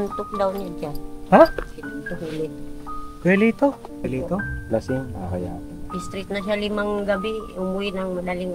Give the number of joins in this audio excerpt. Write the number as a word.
one